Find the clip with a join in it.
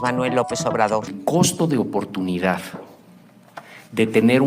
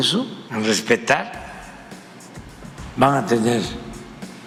first; 1 cut; at 1.1 s

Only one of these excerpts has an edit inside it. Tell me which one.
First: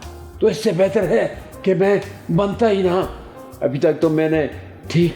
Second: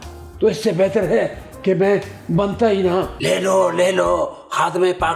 second; 1 cut; at 3.1 s

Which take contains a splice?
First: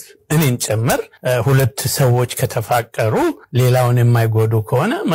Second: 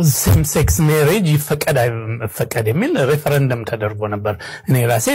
first; 2 cuts; at 1.1 s, 3.4 s

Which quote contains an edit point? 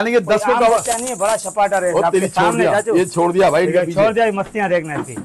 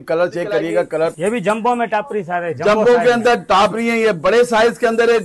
second; 1 cut; at 1.1 s

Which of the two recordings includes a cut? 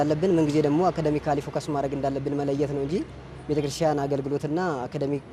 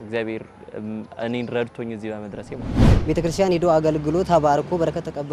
second; 1 cut; at 2.8 s

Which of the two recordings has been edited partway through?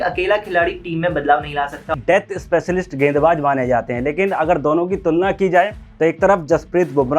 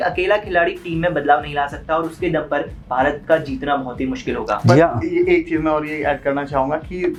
first; 1 cut; at 1.9 s

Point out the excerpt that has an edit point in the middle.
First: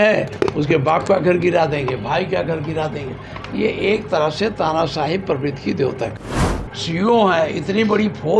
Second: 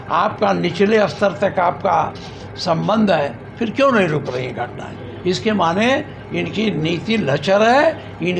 first; 1 cut; at 6.4 s

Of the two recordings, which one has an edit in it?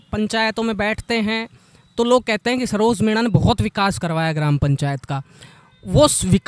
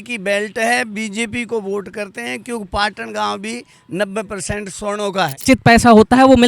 second; 1 cut; at 5.4 s

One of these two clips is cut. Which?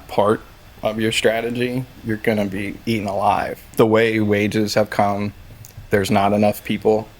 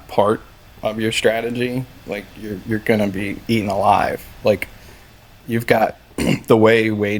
first; 2 cuts; at 1.9 s, 3.7 s

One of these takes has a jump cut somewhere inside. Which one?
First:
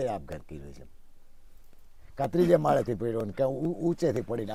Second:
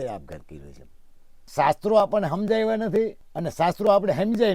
second; 1 cut; at 1.3 s

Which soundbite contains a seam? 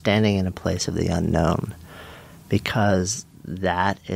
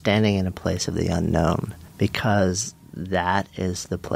second; 1 cut; at 1.8 s

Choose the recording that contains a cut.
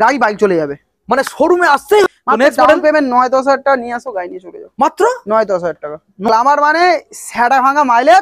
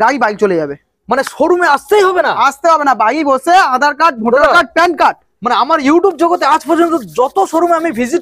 first; 2 cuts; at 2.0 s, 6.3 s

